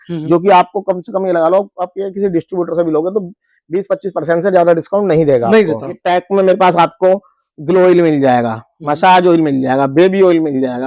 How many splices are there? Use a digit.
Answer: 1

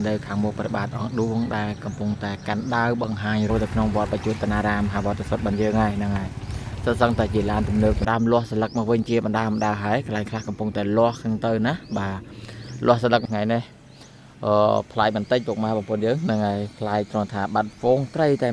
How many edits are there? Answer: 3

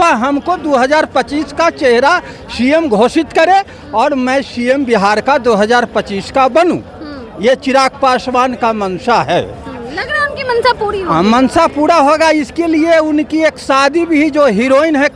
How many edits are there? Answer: 0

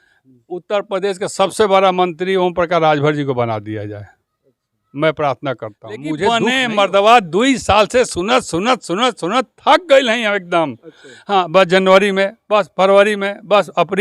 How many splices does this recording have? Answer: 1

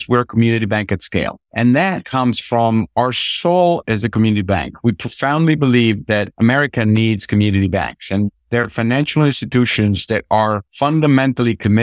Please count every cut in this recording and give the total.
4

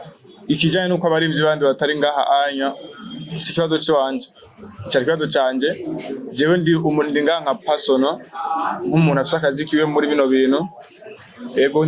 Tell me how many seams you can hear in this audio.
0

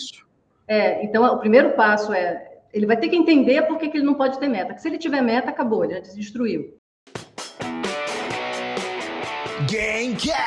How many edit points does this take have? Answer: 1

